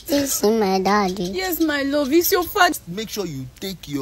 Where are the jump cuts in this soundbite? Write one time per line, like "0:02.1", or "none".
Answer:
0:02.7